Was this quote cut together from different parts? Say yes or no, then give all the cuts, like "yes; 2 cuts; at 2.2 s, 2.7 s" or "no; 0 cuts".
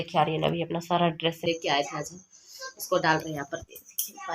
yes; 1 cut; at 1.5 s